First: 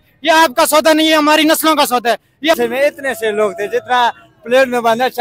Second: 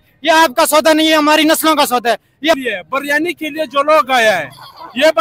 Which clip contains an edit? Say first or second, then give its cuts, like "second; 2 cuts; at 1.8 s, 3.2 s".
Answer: first; 1 cut; at 2.6 s